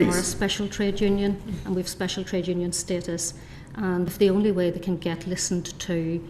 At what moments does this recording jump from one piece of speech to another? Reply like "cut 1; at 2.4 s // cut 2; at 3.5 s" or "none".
cut 1; at 4.1 s